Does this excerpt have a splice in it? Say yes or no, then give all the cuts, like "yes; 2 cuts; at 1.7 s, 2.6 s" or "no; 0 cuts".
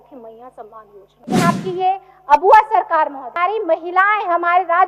yes; 2 cuts; at 1.4 s, 3.4 s